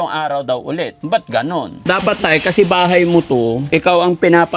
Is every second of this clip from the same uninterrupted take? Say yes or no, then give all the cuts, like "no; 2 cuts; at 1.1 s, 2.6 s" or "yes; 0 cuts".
no; 3 cuts; at 1.0 s, 1.7 s, 3.6 s